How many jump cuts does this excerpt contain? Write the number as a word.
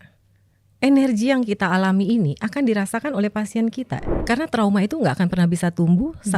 one